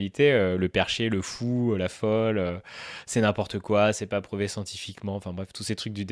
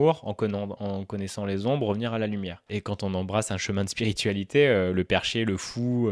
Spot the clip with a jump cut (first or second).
second